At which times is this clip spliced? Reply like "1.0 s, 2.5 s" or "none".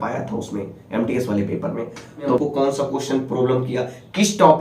2.4 s

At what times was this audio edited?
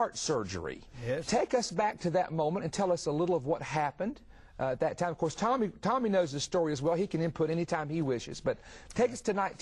6.8 s

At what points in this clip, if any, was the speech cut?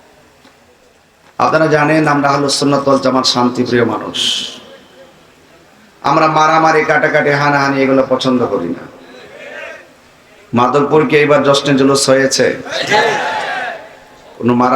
1.0 s

